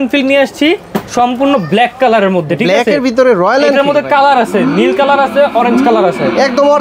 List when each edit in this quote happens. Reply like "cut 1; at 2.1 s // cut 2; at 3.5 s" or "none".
none